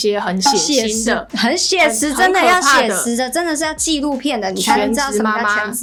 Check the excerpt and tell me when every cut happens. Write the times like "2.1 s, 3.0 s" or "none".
none